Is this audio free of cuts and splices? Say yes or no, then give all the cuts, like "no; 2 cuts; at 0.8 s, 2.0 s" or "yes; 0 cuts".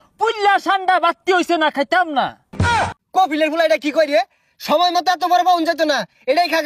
no; 1 cut; at 2.6 s